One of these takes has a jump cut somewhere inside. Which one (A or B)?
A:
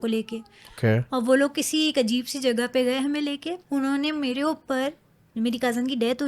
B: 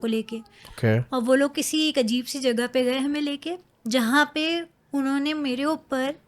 A